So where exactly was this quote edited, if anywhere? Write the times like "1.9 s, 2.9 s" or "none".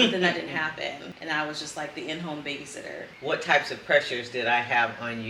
3.1 s